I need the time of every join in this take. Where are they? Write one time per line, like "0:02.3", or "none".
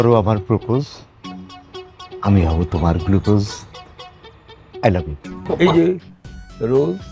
0:05.6